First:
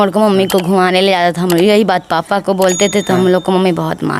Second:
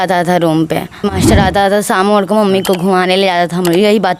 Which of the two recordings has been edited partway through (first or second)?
second